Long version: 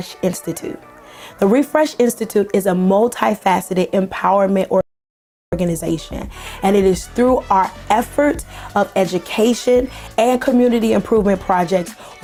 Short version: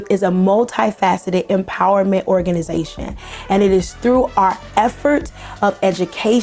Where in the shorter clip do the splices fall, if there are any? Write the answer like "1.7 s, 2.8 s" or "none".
2.4 s